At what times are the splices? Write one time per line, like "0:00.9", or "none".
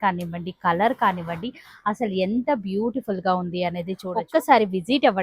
0:04.1